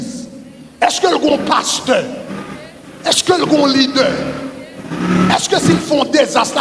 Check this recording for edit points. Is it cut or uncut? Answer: uncut